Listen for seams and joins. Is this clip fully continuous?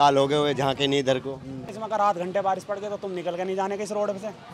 no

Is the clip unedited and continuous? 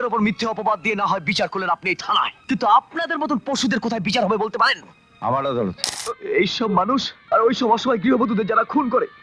no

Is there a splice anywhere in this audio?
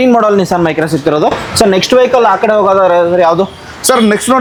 no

